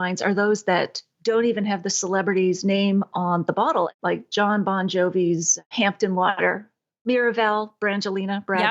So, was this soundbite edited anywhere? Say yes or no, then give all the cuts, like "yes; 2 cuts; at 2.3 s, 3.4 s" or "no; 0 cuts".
yes; 1 cut; at 3.9 s